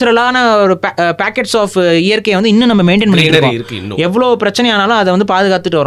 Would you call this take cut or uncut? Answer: uncut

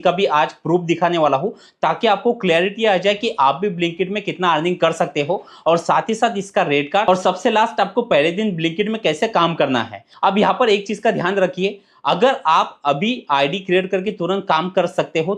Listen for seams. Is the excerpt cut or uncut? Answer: uncut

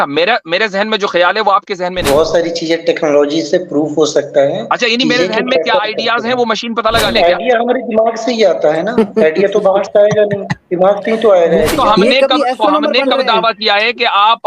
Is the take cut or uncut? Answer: cut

